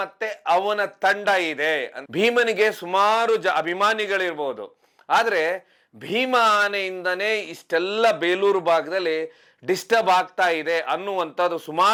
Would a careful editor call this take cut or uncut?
uncut